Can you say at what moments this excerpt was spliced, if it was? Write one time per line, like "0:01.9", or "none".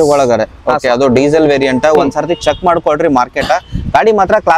none